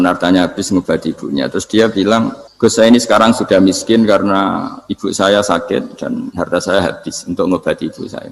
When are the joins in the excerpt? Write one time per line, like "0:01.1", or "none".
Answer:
0:02.4

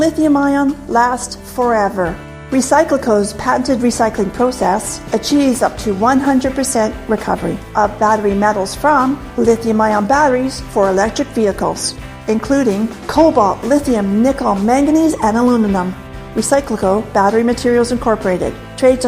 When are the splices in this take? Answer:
0:01.2

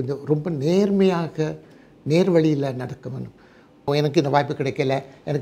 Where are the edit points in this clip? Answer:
0:03.9

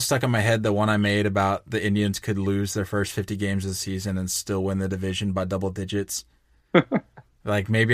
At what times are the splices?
none

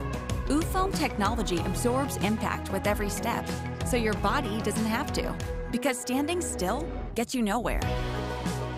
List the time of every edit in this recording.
none

